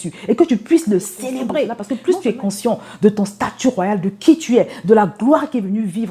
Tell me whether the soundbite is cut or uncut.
cut